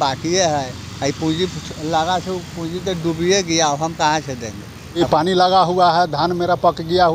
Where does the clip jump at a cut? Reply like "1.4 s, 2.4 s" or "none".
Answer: 5.0 s